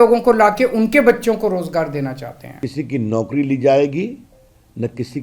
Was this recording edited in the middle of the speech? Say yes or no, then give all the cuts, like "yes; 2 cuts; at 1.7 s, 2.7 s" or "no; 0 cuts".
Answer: yes; 1 cut; at 2.6 s